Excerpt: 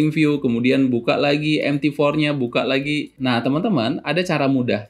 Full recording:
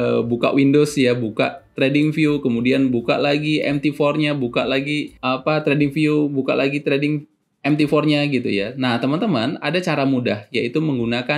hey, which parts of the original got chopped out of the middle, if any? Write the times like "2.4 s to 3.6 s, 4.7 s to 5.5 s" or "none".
5.1 s to 8.7 s

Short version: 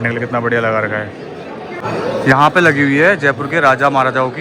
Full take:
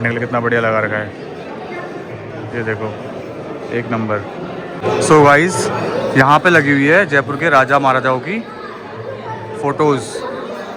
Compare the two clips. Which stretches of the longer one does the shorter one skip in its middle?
1.8 s to 5.7 s

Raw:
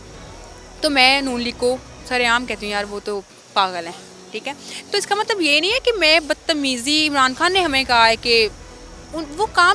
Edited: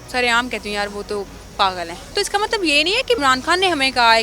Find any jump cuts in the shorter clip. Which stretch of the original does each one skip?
4.0 s to 4.8 s, 6.0 s to 7.1 s

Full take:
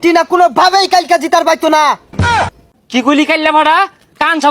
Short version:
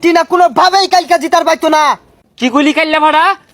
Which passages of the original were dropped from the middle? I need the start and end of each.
2.1 s to 2.6 s

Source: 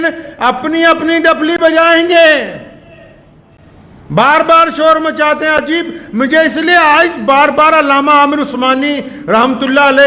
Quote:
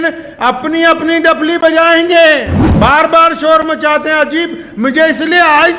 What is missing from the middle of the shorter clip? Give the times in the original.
2.6 s to 3.9 s

